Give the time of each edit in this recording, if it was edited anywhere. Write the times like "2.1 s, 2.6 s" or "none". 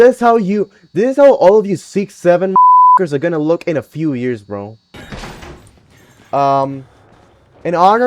4.9 s